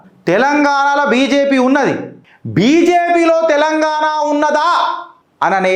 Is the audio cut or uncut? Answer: uncut